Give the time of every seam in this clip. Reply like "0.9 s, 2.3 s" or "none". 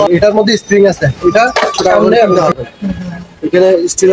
2.4 s